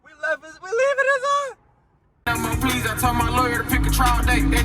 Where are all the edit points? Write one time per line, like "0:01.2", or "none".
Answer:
0:02.3